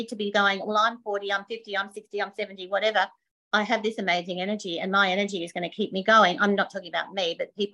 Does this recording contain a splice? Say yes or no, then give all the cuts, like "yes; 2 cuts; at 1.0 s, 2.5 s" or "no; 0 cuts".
no; 0 cuts